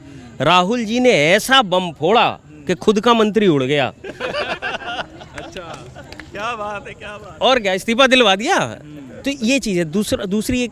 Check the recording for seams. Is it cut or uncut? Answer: uncut